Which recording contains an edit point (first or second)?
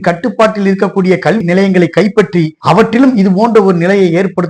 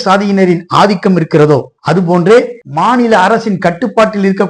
second